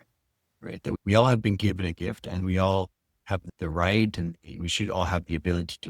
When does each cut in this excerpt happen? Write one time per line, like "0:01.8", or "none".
0:00.9
0:03.4